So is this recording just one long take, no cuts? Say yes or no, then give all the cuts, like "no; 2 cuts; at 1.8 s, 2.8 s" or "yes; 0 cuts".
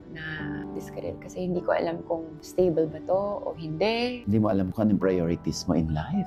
yes; 0 cuts